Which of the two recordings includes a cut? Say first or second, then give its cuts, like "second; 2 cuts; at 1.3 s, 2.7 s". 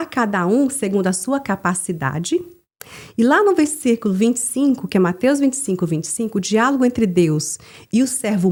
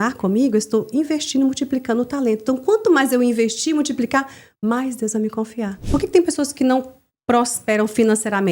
second; 1 cut; at 5.8 s